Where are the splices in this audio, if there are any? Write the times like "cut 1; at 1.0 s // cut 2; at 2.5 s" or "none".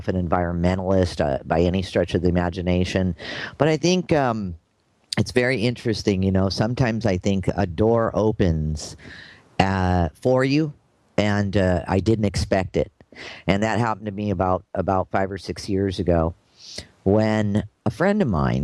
none